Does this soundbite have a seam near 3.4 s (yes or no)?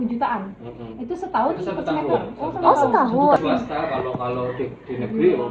yes